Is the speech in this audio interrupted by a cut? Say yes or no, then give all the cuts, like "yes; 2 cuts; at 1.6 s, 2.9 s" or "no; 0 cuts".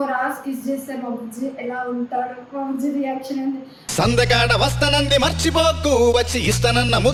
no; 0 cuts